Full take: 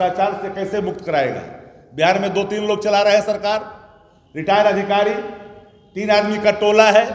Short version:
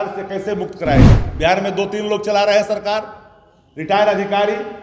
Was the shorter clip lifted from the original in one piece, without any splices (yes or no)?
no